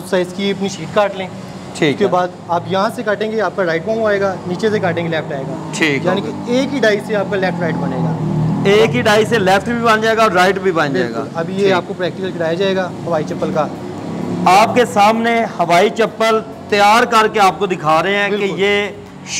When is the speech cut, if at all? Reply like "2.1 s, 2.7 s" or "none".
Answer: none